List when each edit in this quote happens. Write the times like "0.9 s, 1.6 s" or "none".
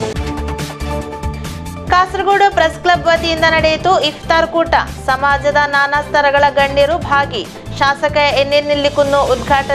1.0 s